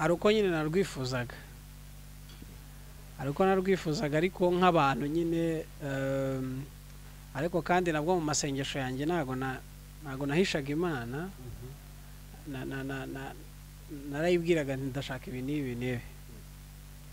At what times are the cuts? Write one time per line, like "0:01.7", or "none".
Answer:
none